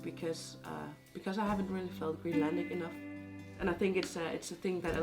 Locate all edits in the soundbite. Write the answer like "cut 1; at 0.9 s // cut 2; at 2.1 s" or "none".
cut 1; at 3.6 s